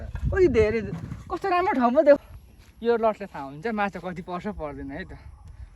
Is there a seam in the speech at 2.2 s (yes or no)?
yes